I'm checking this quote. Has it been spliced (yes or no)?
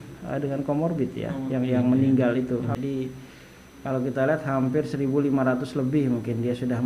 yes